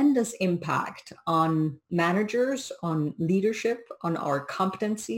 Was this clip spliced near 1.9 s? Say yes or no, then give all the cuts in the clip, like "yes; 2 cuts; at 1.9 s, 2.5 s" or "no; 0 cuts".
yes; 1 cut; at 1.9 s